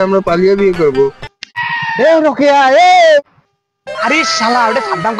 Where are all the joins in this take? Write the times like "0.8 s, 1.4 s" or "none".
1.5 s, 3.3 s